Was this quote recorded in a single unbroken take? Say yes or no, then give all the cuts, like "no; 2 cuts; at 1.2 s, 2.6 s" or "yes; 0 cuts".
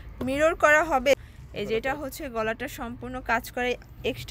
no; 1 cut; at 1.3 s